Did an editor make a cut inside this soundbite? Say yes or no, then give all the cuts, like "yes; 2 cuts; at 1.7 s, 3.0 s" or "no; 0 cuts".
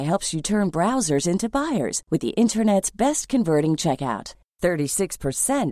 no; 0 cuts